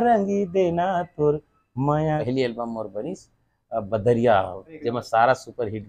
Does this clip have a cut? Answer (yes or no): yes